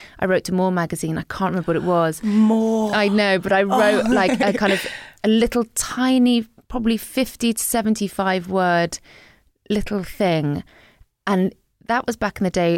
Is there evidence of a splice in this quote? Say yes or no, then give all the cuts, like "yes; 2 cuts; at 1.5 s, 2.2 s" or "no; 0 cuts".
no; 0 cuts